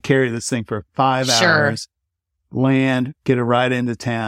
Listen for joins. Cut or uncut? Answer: cut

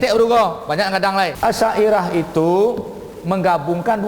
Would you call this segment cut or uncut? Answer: cut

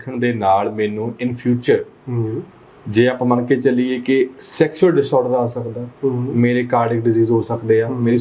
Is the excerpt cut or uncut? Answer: uncut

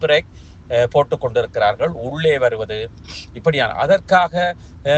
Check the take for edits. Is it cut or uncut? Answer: uncut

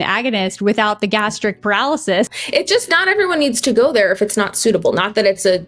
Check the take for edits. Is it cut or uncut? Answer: cut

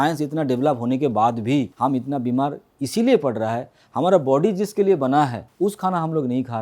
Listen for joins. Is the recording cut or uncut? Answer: cut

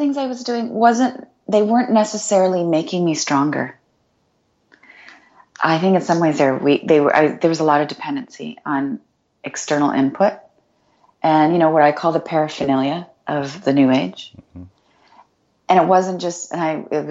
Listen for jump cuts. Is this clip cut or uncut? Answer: uncut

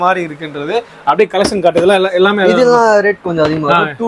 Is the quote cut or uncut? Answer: uncut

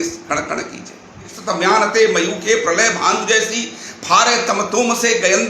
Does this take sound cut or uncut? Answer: cut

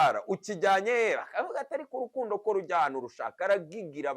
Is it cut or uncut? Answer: uncut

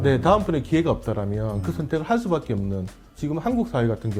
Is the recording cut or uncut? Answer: cut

